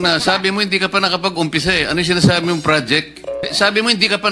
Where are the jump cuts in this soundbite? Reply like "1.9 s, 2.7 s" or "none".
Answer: 2.1 s, 3.3 s